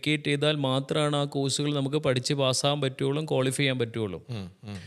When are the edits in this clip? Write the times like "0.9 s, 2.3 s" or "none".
none